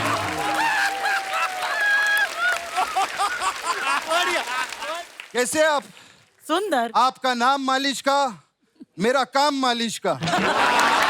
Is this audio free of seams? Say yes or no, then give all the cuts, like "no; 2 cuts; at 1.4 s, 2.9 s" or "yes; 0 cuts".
no; 1 cut; at 4.8 s